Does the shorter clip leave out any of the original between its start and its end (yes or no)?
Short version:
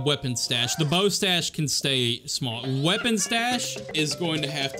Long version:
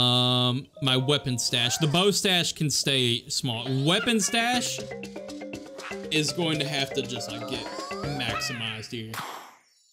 yes